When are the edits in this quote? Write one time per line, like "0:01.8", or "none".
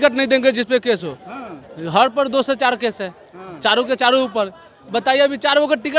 none